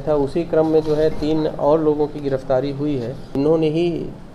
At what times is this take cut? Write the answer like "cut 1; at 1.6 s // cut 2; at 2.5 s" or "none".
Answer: cut 1; at 3.3 s